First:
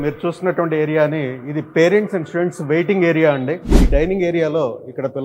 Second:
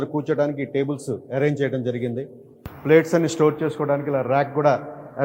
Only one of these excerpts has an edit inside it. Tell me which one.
first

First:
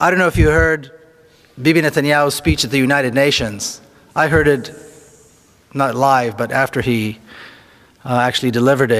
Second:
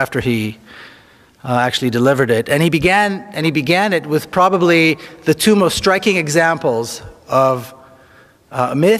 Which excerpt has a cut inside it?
first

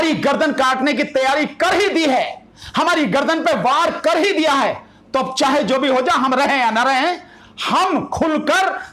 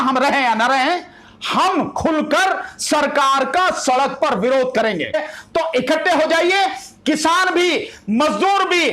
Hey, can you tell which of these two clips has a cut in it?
second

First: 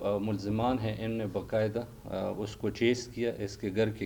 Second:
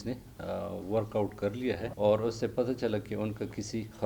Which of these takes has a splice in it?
second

